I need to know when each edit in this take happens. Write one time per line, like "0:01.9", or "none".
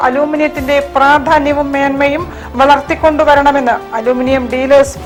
none

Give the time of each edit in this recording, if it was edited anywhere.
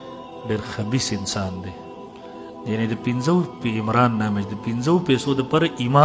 none

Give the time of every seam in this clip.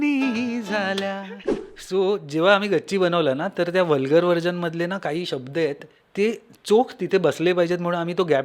0:01.6

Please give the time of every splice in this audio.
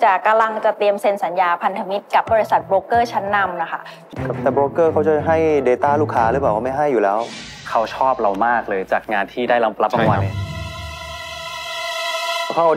0:04.0

